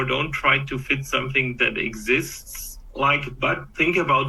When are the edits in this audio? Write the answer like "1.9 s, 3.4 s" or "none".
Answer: none